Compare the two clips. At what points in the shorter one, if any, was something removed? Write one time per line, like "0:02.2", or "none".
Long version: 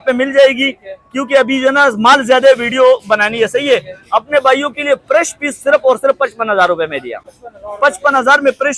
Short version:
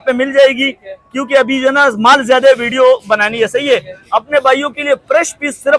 none

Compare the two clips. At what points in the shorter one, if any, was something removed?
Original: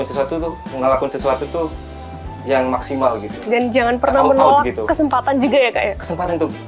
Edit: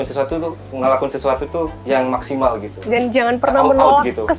0:01.8

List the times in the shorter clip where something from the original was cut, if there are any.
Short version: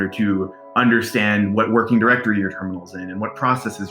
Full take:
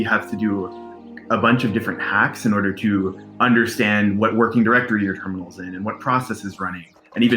none

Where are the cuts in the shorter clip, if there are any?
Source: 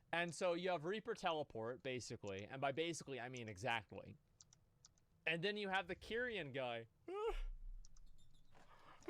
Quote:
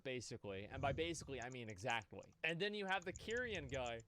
0:02.2

